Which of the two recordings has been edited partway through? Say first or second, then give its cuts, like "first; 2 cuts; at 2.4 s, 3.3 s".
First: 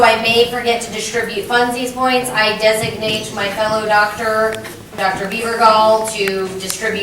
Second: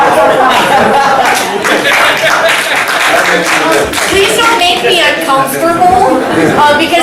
first; 1 cut; at 3.8 s